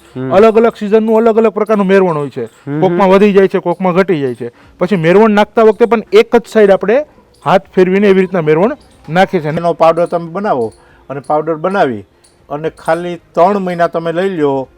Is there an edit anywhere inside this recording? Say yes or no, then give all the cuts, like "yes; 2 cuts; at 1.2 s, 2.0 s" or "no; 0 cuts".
yes; 1 cut; at 9.6 s